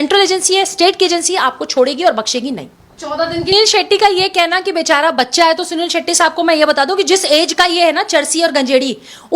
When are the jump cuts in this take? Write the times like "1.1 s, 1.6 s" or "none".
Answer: 3.5 s